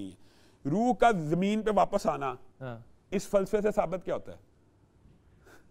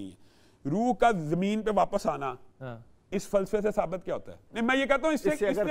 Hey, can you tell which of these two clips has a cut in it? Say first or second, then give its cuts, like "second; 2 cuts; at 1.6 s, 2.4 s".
second; 1 cut; at 4.4 s